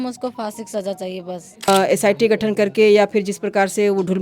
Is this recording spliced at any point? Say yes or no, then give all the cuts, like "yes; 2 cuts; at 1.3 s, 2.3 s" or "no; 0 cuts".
yes; 1 cut; at 1.7 s